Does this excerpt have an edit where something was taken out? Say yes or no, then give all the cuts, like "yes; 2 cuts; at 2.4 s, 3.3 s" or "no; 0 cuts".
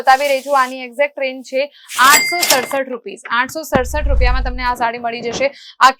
no; 0 cuts